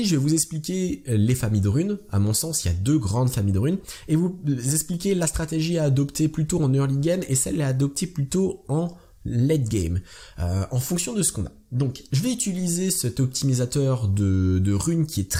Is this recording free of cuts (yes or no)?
yes